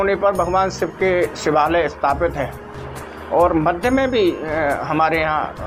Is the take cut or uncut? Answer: uncut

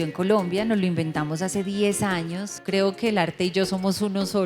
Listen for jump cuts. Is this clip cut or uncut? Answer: cut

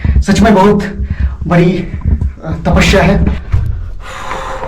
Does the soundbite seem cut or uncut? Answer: cut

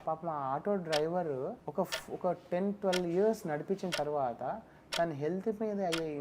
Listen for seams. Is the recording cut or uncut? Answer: cut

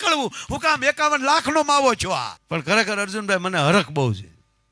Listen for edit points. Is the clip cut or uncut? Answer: cut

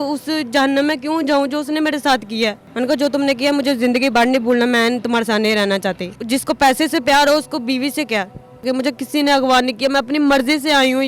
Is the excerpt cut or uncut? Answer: cut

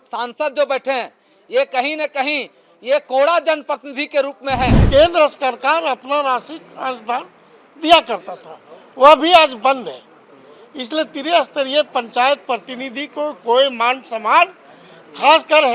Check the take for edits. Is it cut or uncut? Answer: cut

